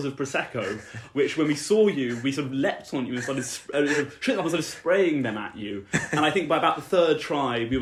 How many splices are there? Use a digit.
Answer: 0